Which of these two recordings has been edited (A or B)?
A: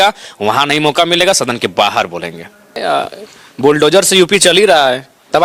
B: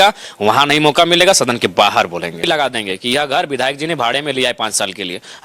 B